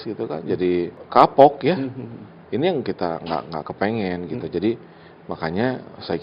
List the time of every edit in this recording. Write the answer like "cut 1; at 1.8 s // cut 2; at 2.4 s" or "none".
cut 1; at 1.0 s

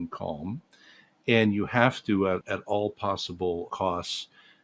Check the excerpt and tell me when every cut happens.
cut 1; at 2.5 s // cut 2; at 3.7 s

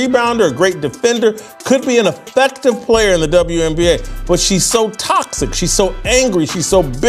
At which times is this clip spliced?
cut 1; at 5.4 s

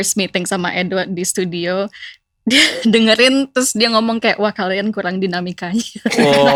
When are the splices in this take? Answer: none

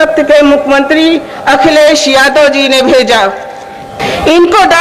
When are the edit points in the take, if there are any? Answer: none

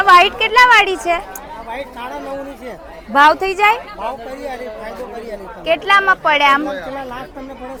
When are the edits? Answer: none

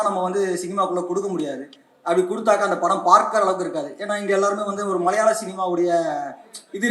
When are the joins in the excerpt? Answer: none

